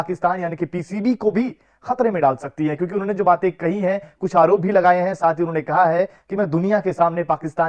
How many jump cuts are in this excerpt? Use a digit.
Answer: 0